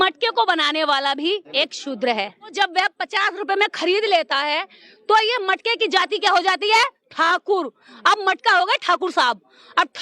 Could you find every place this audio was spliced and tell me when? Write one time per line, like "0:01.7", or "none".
0:01.5
0:02.5